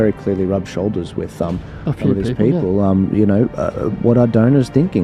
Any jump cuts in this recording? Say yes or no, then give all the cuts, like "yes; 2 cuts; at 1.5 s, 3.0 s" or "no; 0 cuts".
no; 0 cuts